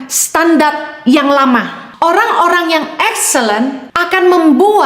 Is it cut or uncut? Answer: cut